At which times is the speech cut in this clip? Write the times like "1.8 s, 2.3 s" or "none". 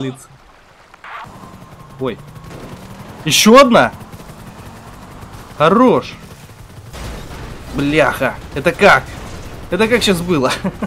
1.2 s